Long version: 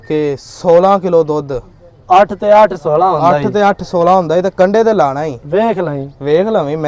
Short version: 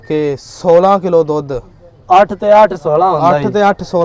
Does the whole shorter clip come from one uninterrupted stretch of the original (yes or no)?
yes